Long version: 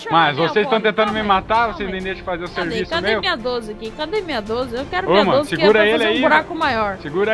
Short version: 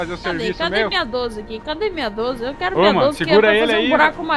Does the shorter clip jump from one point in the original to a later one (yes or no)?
no